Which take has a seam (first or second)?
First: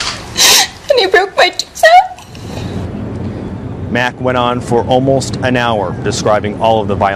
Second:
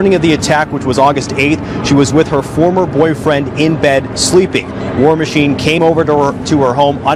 second